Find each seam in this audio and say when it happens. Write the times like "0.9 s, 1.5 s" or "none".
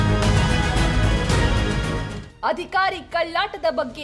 1.8 s